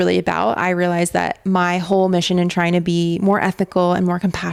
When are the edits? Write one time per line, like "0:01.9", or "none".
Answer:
none